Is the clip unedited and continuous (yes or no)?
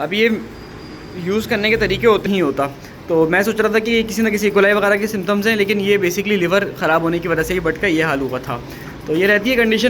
no